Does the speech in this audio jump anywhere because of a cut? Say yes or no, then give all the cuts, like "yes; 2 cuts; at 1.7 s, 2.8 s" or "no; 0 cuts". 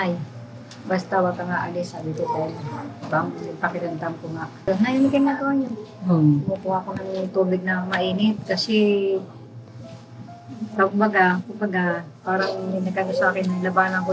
yes; 1 cut; at 4.6 s